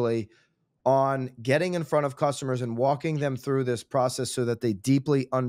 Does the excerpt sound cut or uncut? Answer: uncut